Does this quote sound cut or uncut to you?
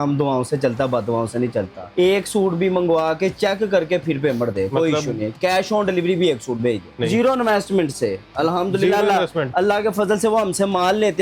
cut